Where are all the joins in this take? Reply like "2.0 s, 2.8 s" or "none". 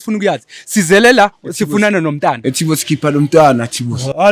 none